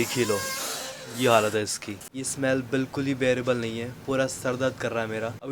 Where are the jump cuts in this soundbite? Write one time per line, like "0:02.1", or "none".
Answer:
none